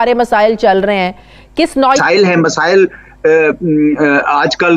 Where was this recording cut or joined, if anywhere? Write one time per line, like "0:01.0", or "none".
0:02.0